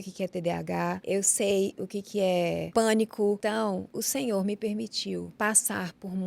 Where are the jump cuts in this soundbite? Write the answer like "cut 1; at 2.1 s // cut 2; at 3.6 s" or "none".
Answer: cut 1; at 1.0 s // cut 2; at 2.7 s // cut 3; at 3.8 s // cut 4; at 5.3 s